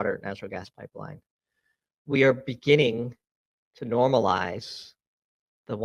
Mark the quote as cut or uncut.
uncut